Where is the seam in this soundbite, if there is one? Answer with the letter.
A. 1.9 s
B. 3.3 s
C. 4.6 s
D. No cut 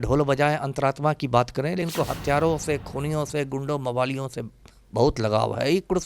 A